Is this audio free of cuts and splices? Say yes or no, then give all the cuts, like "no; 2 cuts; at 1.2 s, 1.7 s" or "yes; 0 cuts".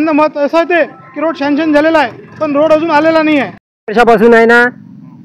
no; 1 cut; at 3.8 s